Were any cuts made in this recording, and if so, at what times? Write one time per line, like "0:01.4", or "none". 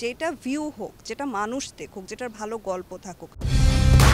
none